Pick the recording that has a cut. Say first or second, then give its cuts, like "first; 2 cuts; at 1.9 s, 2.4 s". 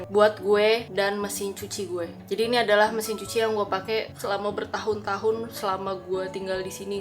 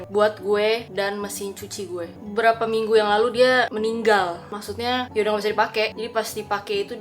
second; 2 cuts; at 2.2 s, 4.6 s